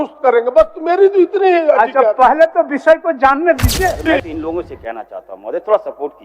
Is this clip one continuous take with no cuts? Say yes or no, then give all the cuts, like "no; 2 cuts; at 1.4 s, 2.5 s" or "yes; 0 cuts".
no; 1 cut; at 4.1 s